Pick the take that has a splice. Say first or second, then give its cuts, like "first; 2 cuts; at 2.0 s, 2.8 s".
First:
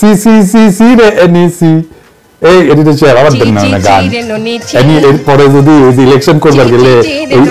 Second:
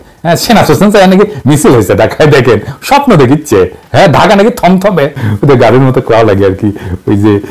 second; 1 cut; at 5.2 s